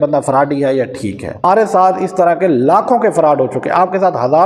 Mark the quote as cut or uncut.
cut